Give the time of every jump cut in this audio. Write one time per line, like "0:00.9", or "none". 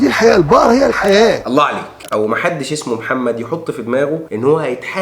0:02.0